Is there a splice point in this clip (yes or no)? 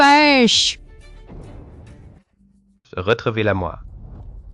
yes